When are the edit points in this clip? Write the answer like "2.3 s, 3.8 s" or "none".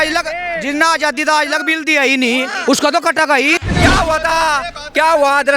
3.6 s